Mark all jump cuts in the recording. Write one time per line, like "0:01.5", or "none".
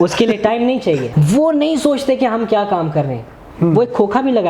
0:01.1